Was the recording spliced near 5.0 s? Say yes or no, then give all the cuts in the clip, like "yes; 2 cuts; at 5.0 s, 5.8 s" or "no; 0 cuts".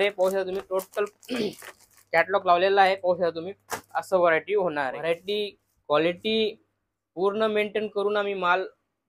yes; 1 cut; at 5.0 s